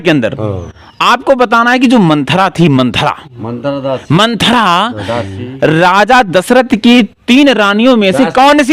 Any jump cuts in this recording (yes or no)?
no